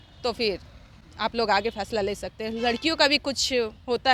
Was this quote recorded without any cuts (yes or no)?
yes